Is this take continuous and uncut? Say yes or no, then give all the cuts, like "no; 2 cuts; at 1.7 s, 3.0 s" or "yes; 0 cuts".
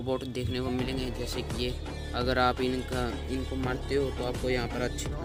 yes; 0 cuts